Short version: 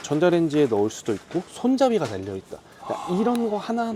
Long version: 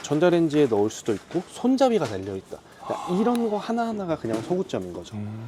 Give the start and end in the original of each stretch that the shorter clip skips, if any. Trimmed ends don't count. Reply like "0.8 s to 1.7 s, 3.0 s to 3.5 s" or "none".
none